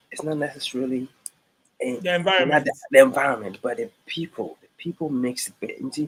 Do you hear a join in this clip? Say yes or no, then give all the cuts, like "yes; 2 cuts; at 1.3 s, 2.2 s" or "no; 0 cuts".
no; 0 cuts